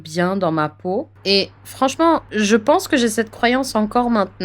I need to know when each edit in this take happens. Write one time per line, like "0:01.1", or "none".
0:01.2
0:02.3